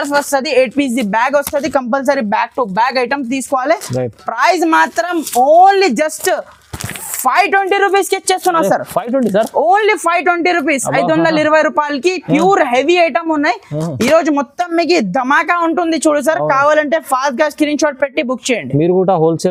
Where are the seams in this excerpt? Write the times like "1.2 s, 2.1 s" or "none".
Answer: none

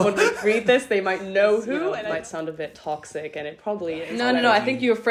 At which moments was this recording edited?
2.0 s, 4.1 s

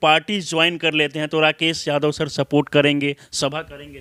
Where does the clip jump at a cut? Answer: none

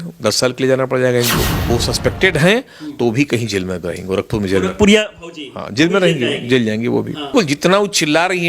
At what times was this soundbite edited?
1.7 s, 7.3 s

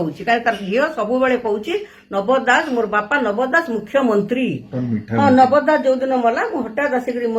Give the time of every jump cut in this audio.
4.7 s

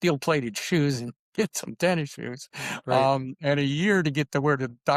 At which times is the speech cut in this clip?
none

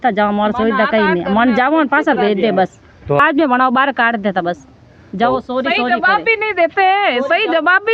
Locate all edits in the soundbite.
none

